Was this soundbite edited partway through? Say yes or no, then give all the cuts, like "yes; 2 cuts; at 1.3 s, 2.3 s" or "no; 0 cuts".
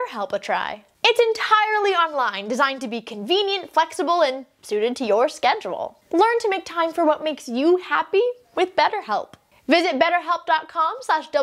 no; 0 cuts